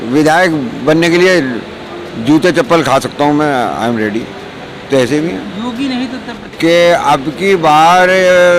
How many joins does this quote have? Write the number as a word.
one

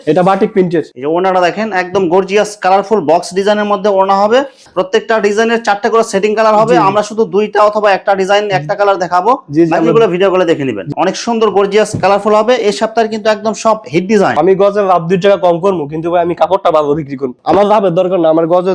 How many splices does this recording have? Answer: four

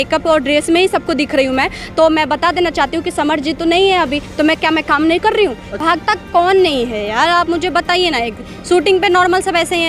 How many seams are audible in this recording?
zero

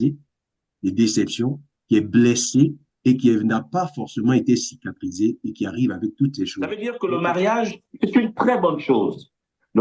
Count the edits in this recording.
one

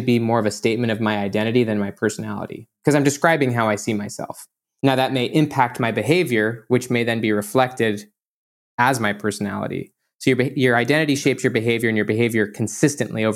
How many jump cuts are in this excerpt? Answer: one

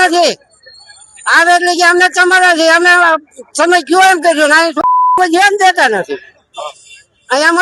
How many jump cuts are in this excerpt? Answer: zero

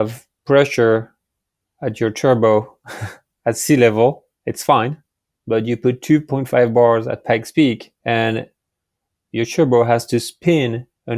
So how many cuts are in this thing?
zero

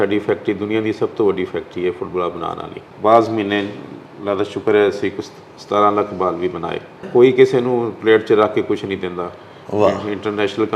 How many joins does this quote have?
two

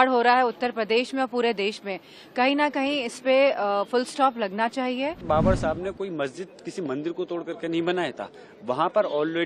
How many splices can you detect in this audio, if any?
one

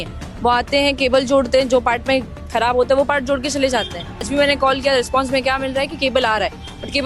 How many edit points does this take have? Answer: one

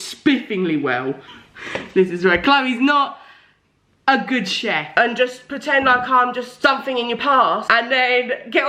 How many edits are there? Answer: one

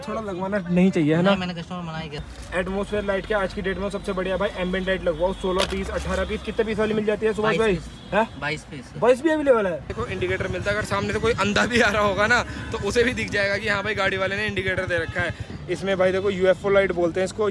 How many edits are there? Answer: three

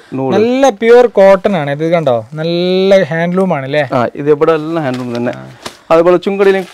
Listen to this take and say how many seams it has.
zero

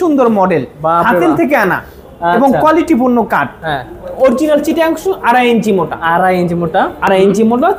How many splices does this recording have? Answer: zero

